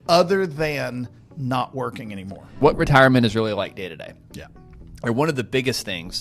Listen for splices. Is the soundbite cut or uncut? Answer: cut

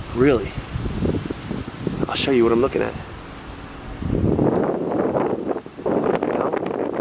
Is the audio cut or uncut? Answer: uncut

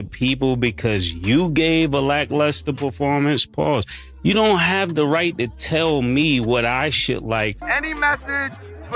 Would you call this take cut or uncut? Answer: cut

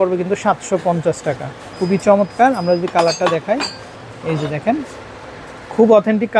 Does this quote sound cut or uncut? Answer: uncut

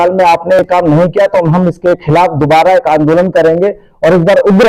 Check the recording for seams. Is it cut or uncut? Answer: uncut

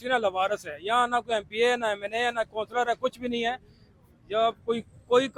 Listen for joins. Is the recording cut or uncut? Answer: uncut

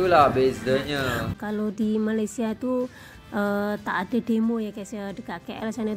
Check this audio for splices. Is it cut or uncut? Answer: cut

